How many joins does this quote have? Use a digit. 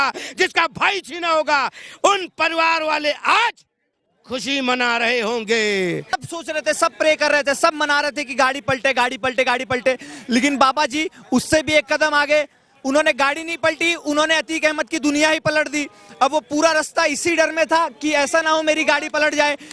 1